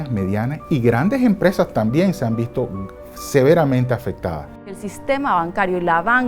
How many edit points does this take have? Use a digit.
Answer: 1